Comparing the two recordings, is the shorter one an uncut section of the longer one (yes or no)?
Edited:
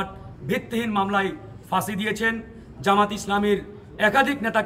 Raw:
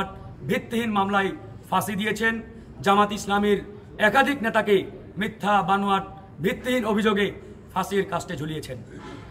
yes